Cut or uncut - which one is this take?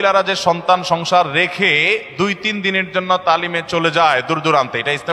uncut